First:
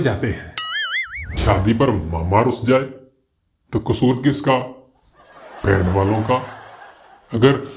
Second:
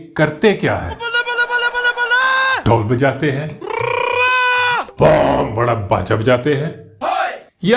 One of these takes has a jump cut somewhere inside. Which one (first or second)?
first